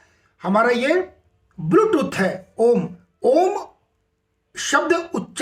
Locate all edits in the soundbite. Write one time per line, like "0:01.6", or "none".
0:03.0